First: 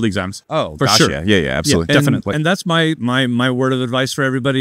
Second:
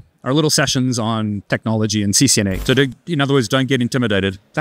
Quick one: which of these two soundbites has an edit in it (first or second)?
second